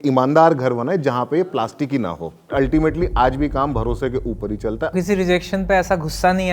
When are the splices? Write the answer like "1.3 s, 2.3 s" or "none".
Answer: 2.5 s, 4.9 s